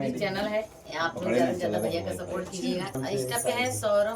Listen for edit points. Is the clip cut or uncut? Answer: cut